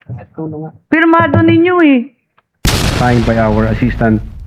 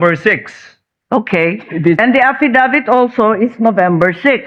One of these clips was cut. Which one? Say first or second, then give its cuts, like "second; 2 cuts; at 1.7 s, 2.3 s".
first; 1 cut; at 2.9 s